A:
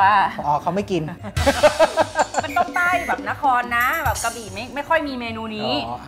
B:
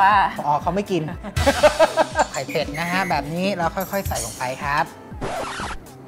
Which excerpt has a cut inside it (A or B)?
B